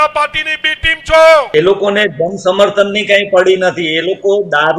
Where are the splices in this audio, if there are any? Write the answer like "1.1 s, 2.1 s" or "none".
1.5 s